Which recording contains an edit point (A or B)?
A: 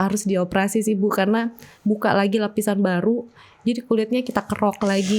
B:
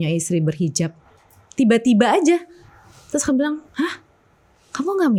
A